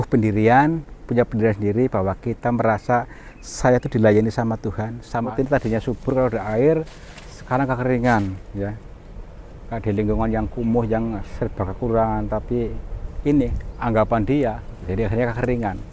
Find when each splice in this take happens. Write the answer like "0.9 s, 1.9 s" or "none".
5.3 s